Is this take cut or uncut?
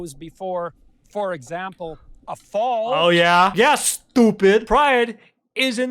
cut